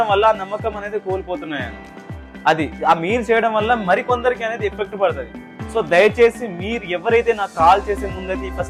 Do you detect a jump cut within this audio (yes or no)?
no